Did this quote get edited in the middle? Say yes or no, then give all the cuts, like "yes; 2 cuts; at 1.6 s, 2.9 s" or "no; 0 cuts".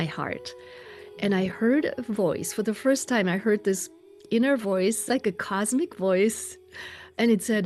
no; 0 cuts